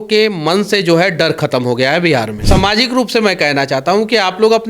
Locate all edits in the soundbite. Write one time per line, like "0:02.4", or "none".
0:02.4